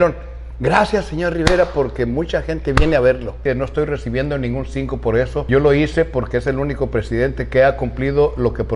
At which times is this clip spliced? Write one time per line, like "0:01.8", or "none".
0:03.4
0:05.5